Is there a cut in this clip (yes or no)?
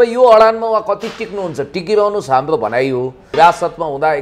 yes